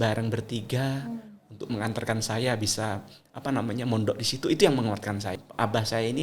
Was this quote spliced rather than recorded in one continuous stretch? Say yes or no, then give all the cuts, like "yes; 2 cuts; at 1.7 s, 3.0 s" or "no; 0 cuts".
yes; 1 cut; at 5.3 s